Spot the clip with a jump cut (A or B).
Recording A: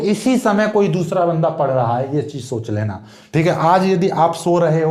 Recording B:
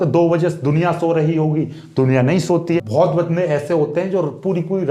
B